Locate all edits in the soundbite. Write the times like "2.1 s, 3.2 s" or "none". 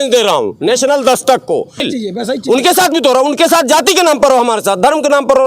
1.8 s

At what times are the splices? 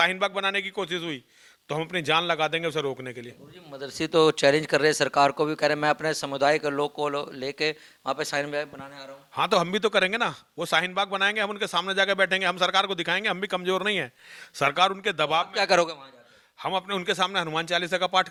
none

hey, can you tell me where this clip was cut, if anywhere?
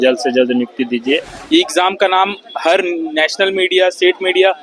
1.3 s

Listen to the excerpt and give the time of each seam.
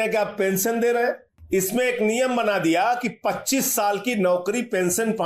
1.3 s

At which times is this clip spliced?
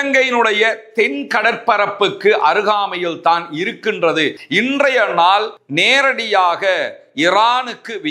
4.4 s

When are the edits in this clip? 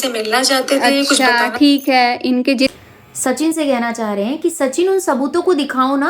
2.7 s

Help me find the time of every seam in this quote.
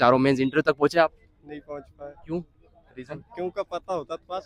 none

